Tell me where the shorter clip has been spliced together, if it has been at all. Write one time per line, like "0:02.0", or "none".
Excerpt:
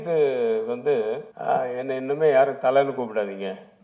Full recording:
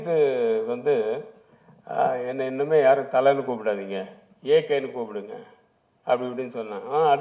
0:01.3